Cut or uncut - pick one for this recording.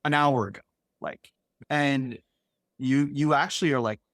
cut